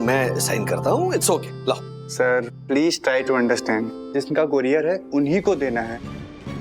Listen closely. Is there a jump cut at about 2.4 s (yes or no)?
no